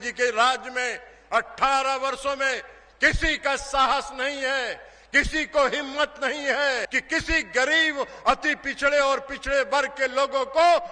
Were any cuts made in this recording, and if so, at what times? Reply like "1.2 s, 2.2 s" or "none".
6.9 s